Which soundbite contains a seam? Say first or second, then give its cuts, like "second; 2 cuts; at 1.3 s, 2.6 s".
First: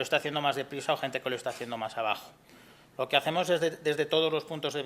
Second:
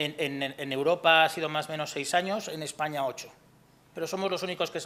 first; 1 cut; at 2.1 s